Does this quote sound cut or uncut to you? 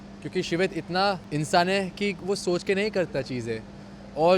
cut